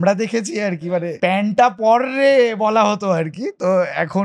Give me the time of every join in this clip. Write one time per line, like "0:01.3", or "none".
0:01.1